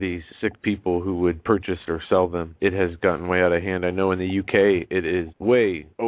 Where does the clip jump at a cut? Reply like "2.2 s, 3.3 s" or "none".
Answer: 5.1 s